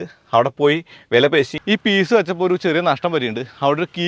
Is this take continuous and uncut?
no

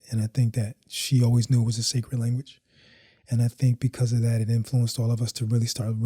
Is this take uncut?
yes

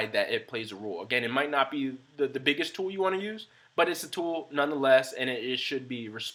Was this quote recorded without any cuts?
yes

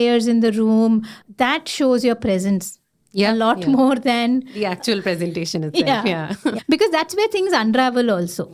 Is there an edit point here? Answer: yes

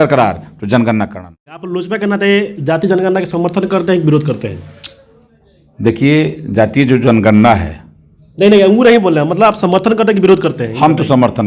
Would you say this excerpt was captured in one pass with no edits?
no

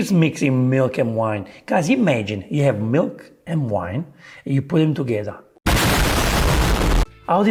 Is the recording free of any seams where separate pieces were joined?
yes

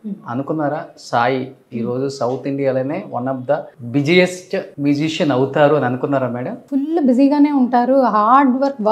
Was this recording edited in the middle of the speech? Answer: yes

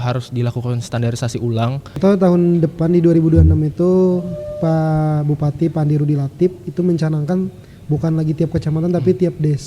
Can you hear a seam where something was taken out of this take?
yes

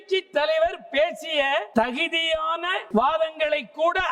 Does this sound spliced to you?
yes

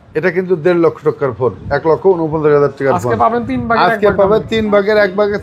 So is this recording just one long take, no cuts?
yes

